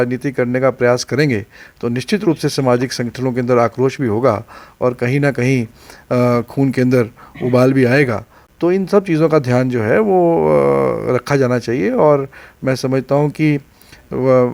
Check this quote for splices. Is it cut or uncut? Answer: uncut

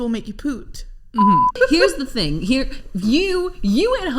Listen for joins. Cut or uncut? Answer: cut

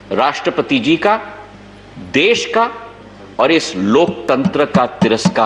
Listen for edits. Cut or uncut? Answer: uncut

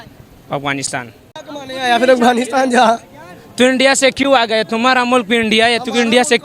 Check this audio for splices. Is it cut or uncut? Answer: cut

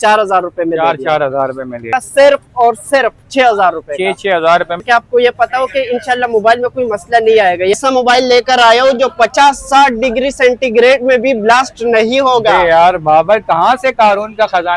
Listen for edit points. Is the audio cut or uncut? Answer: cut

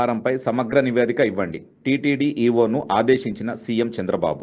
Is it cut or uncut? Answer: uncut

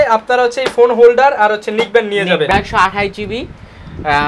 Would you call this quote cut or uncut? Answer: cut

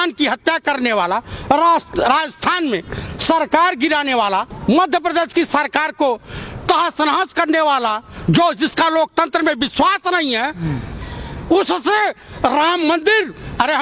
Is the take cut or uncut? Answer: cut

